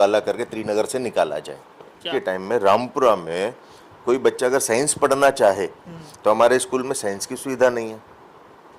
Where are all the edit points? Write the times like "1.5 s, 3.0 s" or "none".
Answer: 2.1 s